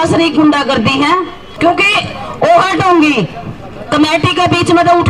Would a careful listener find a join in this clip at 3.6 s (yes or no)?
no